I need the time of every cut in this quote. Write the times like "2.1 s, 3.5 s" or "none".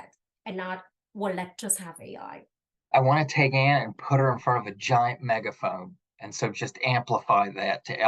2.9 s